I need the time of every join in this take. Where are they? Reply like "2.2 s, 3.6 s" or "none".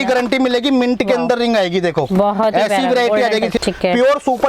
3.5 s